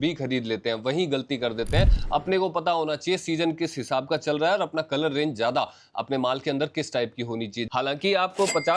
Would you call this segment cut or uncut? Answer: cut